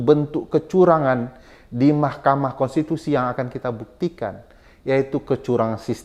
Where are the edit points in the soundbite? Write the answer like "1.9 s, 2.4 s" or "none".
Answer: none